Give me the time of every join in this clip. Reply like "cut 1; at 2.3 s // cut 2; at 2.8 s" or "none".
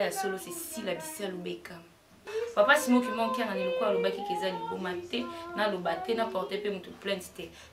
cut 1; at 2.3 s

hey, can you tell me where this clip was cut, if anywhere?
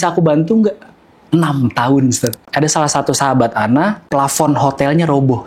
cut 1; at 2.4 s // cut 2; at 4.0 s

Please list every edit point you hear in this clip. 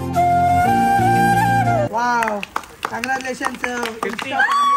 cut 1; at 1.9 s

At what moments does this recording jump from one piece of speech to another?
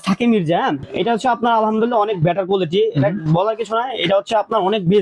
none

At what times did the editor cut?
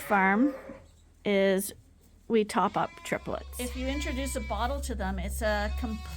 cut 1; at 3.5 s

